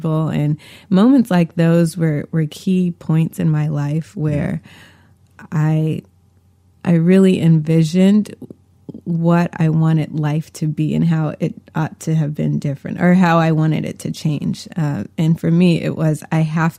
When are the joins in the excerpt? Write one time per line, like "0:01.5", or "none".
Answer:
none